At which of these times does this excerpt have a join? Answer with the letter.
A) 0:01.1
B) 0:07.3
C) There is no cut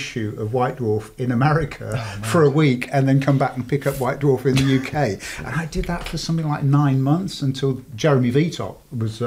C